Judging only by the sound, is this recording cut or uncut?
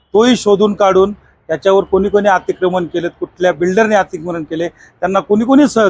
uncut